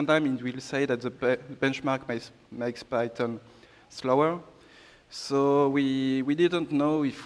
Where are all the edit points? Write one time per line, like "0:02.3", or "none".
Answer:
none